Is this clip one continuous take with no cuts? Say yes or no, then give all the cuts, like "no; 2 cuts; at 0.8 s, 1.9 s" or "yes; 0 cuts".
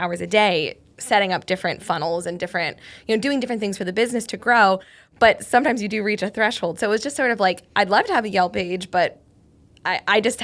yes; 0 cuts